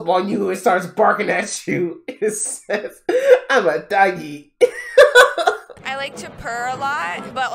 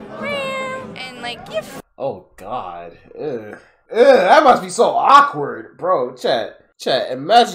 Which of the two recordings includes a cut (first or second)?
first